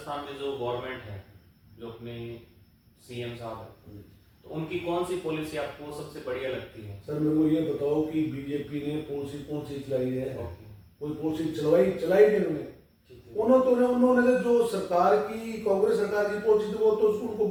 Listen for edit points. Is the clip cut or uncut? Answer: uncut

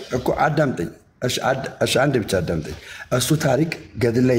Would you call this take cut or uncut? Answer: uncut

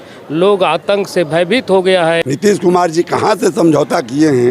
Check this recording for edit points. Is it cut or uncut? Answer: cut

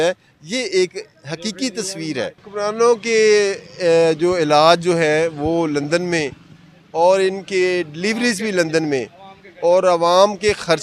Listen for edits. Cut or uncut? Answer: cut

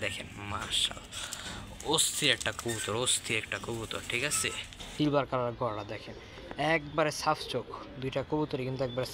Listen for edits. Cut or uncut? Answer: cut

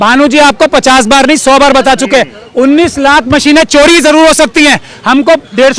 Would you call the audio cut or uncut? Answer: uncut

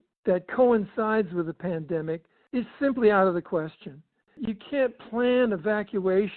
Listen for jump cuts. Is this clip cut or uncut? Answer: cut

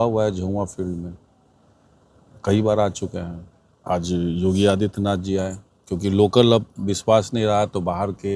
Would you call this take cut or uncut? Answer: uncut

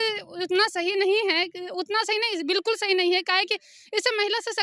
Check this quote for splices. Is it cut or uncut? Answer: uncut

